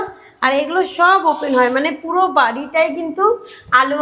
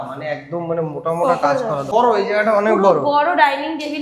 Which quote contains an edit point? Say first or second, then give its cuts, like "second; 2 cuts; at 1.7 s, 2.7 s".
second; 1 cut; at 1.9 s